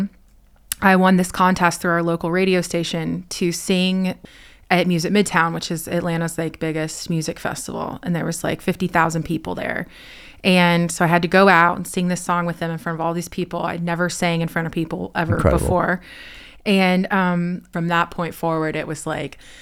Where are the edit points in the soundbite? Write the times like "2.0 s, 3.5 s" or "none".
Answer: 4.2 s, 17.7 s